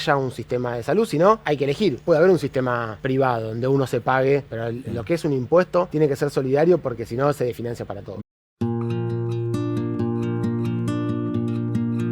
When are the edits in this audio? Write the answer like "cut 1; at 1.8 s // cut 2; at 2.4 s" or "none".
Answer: cut 1; at 1.9 s // cut 2; at 2.9 s // cut 3; at 4.5 s // cut 4; at 5.9 s // cut 5; at 8.1 s